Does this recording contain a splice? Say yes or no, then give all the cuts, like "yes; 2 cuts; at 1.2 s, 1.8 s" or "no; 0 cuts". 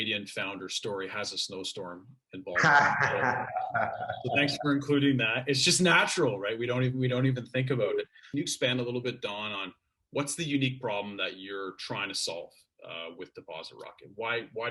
yes; 1 cut; at 8.2 s